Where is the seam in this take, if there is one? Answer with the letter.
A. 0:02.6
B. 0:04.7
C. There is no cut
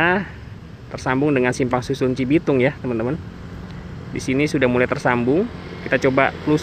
C